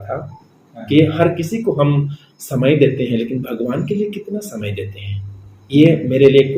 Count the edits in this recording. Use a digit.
0